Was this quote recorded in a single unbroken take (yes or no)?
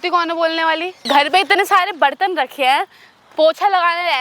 no